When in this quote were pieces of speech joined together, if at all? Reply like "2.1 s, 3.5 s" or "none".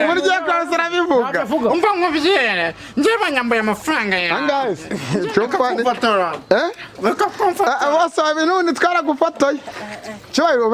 4.9 s

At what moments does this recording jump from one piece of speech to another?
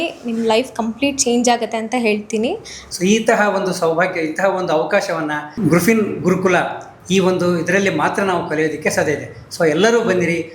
2.7 s

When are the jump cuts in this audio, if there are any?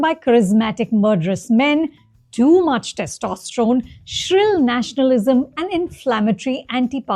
none

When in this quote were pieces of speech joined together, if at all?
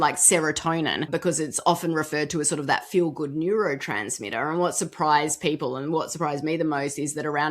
1.0 s

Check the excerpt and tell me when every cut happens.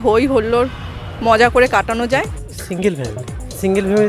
none

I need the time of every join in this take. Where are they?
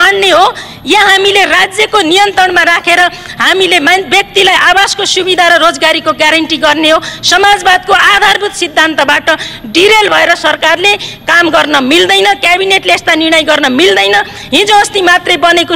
none

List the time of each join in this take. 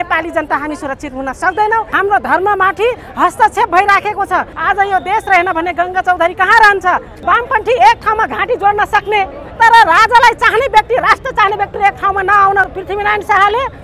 1.9 s, 4.5 s, 7.1 s, 12.8 s

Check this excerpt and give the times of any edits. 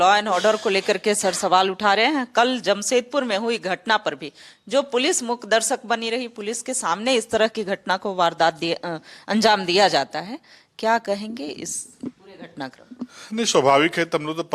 none

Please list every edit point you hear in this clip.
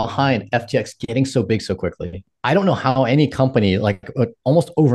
2.3 s

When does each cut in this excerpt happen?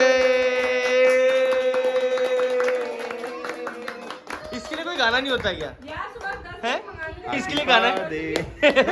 none

